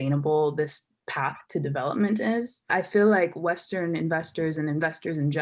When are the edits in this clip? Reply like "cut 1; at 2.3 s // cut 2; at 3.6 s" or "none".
cut 1; at 2.7 s